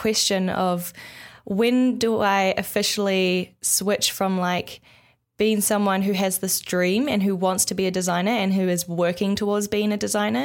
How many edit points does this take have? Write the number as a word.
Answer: zero